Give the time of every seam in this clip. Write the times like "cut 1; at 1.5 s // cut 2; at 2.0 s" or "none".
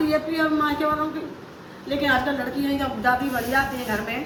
none